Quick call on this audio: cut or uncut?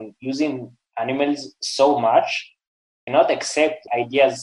uncut